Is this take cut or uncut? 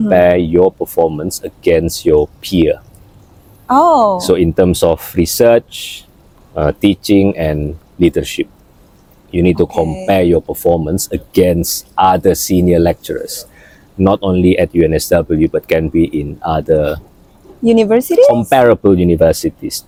uncut